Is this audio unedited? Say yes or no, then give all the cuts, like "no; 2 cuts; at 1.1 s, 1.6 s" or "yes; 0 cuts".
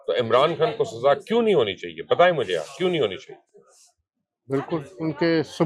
yes; 0 cuts